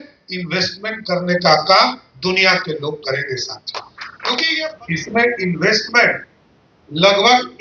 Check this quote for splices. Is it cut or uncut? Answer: cut